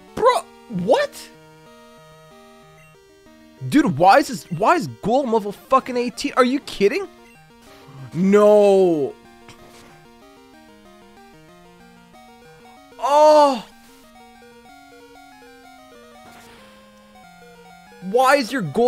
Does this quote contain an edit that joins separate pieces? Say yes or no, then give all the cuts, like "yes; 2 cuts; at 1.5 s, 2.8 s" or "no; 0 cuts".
no; 0 cuts